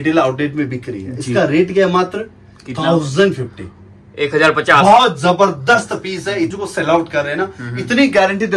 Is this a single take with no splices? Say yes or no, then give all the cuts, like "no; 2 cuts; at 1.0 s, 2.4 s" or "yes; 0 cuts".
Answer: no; 1 cut; at 6.5 s